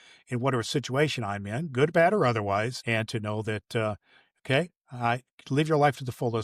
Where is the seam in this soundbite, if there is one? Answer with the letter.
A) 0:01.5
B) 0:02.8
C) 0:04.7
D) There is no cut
B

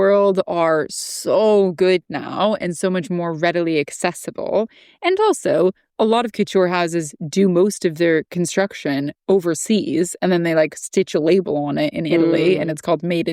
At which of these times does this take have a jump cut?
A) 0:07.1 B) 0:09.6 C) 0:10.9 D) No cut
D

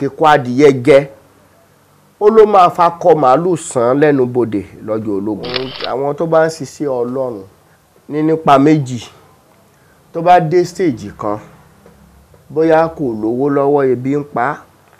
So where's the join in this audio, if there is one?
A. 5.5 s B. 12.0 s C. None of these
A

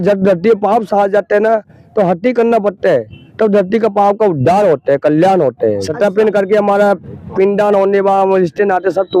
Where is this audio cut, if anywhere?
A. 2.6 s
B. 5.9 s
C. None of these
B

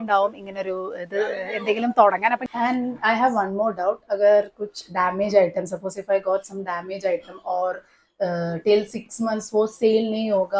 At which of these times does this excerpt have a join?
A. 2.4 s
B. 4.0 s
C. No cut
A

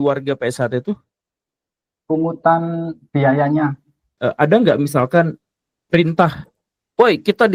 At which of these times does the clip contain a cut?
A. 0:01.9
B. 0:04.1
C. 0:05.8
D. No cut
B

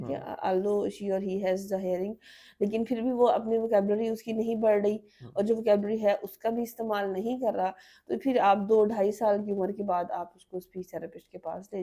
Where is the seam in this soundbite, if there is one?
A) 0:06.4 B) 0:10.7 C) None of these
C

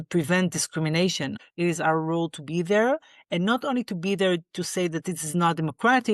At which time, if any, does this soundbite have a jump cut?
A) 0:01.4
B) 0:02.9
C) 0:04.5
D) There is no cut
A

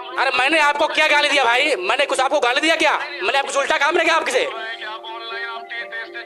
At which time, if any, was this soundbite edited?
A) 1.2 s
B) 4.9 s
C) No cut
C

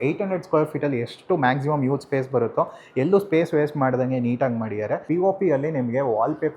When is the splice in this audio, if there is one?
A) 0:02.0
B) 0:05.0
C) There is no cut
B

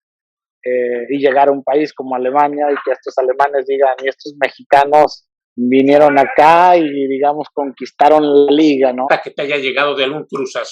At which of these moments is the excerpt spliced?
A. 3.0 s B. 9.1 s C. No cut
B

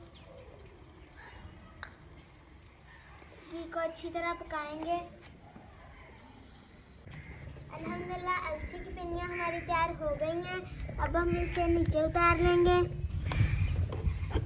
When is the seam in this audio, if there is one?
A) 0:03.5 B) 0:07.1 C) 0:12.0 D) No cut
B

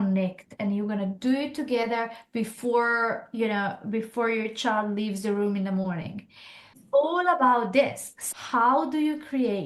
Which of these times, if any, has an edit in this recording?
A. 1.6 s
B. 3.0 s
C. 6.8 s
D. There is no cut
C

